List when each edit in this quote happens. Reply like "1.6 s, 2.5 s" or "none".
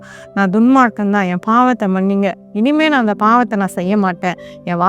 none